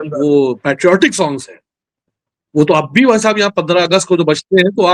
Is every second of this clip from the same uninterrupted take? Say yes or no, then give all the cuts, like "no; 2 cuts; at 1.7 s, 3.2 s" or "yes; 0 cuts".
yes; 0 cuts